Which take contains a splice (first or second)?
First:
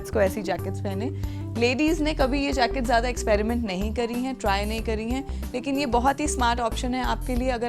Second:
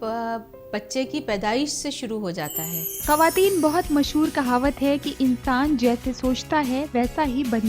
second